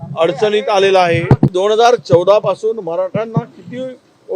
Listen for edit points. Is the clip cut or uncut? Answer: cut